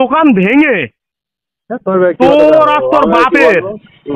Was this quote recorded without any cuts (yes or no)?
yes